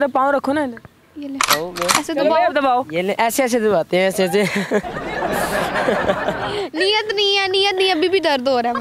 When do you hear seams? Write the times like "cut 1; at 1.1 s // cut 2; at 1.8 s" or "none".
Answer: none